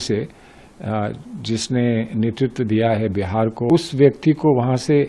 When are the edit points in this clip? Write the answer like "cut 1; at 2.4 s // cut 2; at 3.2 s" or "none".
cut 1; at 3.7 s

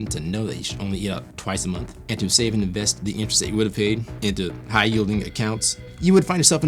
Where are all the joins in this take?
cut 1; at 1.9 s // cut 2; at 5.8 s

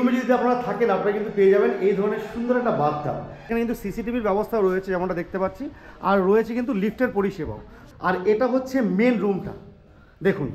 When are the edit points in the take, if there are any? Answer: cut 1; at 3.5 s // cut 2; at 7.8 s

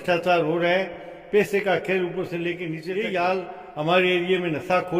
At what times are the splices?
cut 1; at 2.8 s

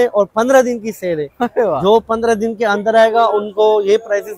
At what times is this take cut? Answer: none

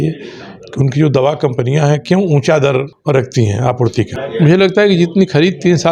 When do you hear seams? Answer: cut 1; at 2.9 s // cut 2; at 4.2 s

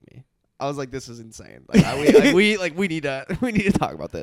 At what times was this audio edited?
none

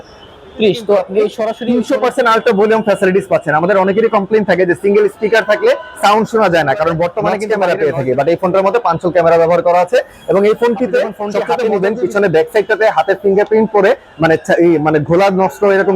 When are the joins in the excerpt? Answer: cut 1; at 1.5 s // cut 2; at 7.4 s // cut 3; at 11.5 s

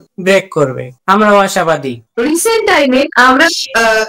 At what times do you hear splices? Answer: cut 1; at 2.0 s

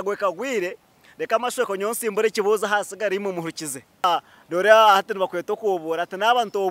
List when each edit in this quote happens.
cut 1; at 4.1 s

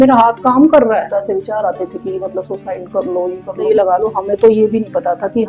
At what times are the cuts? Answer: cut 1; at 1.1 s // cut 2; at 3.6 s

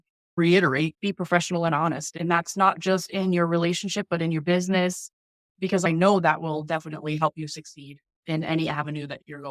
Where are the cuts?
cut 1; at 0.9 s // cut 2; at 5.8 s

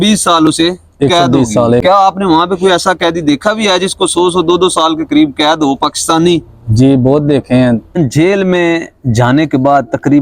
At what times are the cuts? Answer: cut 1; at 1.8 s // cut 2; at 7.9 s

